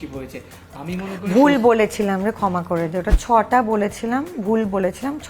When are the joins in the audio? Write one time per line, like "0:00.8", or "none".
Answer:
0:03.1